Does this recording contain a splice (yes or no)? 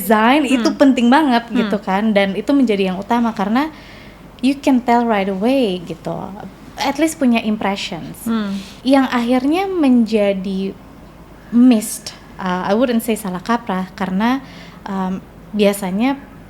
no